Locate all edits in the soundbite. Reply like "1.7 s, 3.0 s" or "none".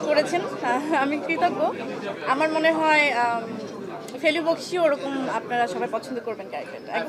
none